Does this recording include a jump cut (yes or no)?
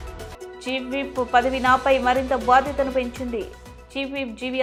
no